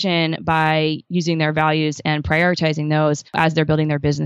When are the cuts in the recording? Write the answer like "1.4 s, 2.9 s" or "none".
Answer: 3.4 s